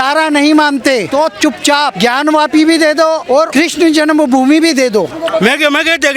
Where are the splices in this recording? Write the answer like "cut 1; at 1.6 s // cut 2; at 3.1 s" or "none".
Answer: cut 1; at 1.1 s // cut 2; at 1.9 s // cut 3; at 3.3 s // cut 4; at 5.2 s